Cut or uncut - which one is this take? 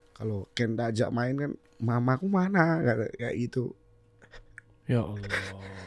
cut